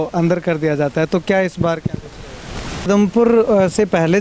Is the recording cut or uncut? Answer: cut